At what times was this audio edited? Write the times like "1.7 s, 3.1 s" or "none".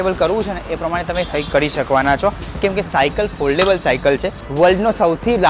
4.4 s